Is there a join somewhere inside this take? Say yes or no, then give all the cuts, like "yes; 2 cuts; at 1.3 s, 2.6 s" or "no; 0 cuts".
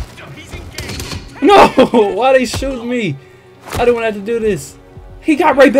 no; 0 cuts